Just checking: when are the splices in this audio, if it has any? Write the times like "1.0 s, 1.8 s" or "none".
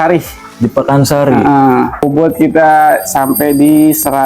2.0 s